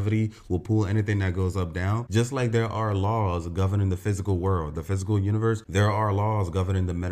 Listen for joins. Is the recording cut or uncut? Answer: uncut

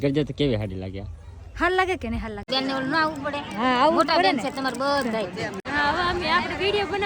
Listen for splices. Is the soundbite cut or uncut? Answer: cut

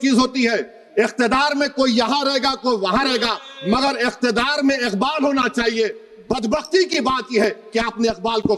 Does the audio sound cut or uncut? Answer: uncut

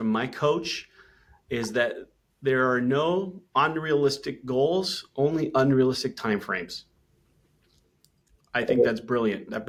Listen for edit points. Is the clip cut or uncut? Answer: uncut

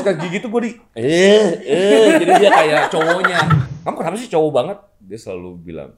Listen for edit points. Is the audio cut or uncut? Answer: cut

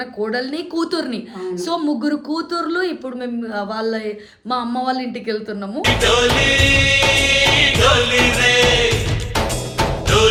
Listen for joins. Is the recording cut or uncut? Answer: uncut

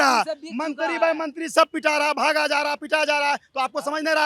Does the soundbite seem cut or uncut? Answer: uncut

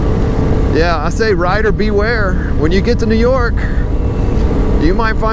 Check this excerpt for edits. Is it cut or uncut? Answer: uncut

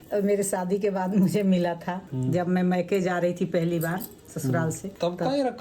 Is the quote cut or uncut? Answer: cut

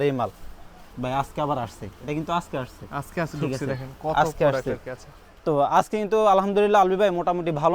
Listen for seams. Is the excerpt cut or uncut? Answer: uncut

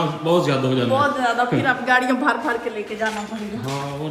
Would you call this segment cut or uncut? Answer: uncut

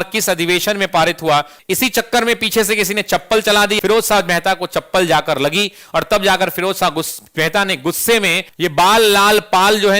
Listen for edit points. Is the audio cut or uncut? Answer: cut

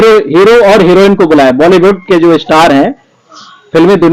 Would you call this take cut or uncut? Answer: uncut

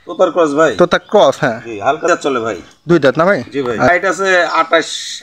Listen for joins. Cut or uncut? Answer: cut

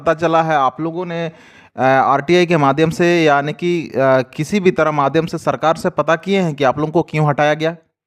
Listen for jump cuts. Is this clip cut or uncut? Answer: uncut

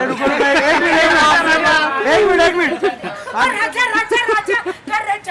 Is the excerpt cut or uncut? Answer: cut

